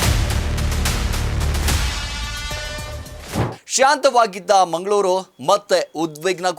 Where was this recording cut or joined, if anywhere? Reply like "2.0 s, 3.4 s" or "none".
3.6 s